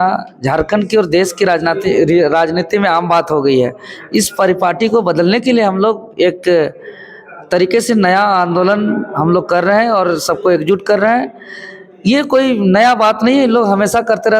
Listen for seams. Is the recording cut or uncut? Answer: uncut